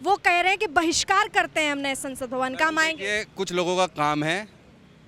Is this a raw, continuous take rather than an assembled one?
yes; 0 cuts

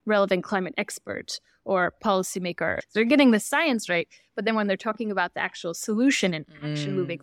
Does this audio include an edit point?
yes; 1 cut; at 2.8 s

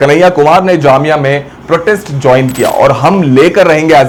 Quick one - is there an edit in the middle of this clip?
no; 0 cuts

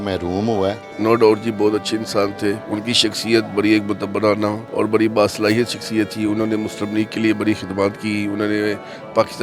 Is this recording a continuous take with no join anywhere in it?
no; 3 cuts; at 0.8 s, 2.6 s, 4.6 s

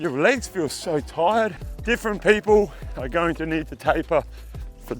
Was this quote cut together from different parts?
yes; 1 cut; at 1.7 s

